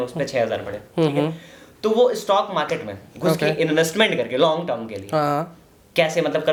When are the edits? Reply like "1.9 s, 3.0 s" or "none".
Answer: none